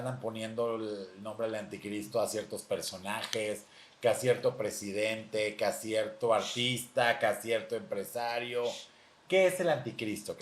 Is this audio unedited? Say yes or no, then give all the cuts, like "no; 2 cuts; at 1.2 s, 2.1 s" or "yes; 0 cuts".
yes; 0 cuts